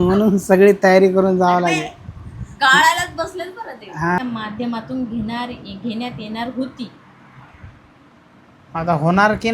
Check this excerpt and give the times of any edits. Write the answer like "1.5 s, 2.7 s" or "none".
4.2 s